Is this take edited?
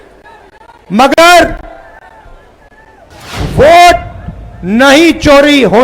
yes; 1 cut; at 3.1 s

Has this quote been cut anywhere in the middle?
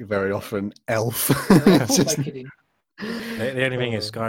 yes; 1 cut; at 3.2 s

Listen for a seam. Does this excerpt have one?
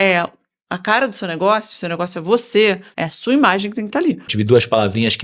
yes; 2 cuts; at 2.9 s, 4.3 s

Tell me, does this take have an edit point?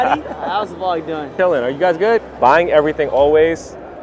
yes; 2 cuts; at 1.3 s, 2.3 s

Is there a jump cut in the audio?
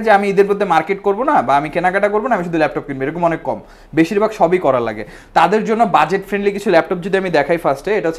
no; 0 cuts

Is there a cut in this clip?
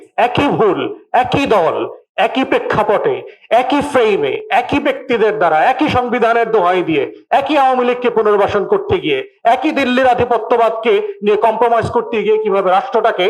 no; 0 cuts

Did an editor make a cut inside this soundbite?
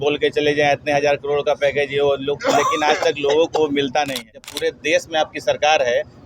yes; 1 cut; at 4.5 s

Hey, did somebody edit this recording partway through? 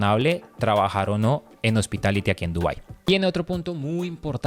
no; 0 cuts

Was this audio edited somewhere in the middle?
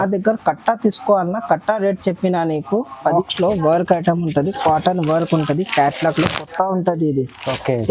yes; 1 cut; at 3.2 s

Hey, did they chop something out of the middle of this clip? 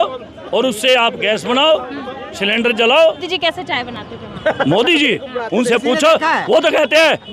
yes; 1 cut; at 3.3 s

